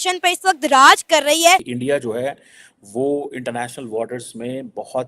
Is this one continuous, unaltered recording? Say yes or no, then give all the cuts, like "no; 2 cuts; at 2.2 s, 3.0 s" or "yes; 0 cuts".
no; 1 cut; at 1.7 s